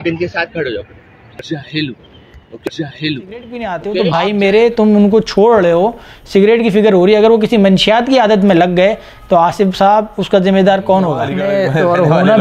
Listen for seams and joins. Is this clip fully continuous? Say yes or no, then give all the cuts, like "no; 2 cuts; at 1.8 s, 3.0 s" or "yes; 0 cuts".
no; 3 cuts; at 1.5 s, 3.4 s, 11.3 s